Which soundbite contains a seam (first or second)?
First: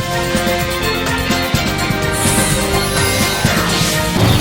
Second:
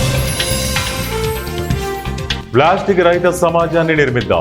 second